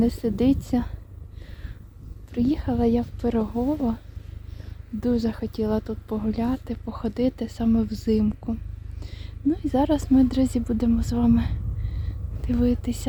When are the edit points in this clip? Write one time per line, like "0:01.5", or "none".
none